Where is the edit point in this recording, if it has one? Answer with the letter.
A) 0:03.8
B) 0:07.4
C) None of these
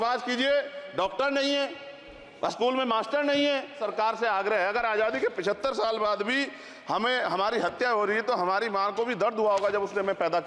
A